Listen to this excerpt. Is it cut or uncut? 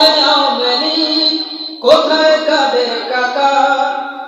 uncut